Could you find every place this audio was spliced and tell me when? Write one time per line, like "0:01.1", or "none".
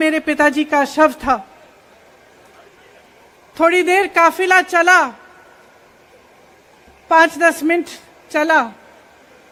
none